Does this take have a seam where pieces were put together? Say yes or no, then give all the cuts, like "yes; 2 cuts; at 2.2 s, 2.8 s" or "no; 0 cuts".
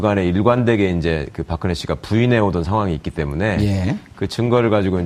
no; 0 cuts